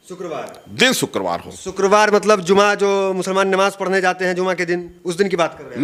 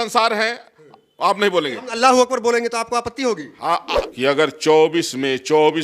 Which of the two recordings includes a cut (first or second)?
second